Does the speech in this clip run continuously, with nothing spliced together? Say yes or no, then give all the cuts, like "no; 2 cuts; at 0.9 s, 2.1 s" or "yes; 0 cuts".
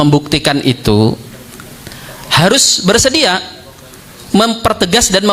yes; 0 cuts